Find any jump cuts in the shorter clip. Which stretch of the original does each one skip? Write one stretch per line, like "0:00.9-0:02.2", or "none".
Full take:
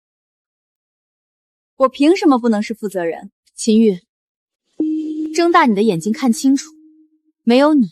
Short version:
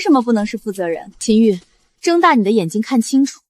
0:03.2-0:03.5
0:04.4-0:05.3